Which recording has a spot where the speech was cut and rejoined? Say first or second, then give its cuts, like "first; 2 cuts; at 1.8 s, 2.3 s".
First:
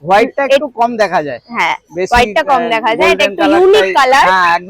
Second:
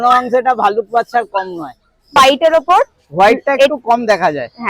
second; 1 cut; at 2.2 s